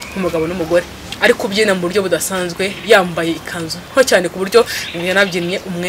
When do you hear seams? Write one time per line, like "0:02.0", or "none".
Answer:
0:01.1